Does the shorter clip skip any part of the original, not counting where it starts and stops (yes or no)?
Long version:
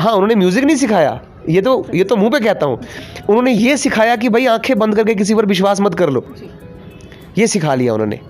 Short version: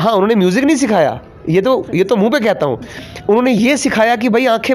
no